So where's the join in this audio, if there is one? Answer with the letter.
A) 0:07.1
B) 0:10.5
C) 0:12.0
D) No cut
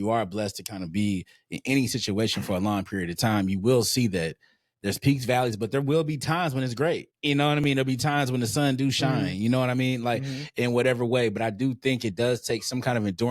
A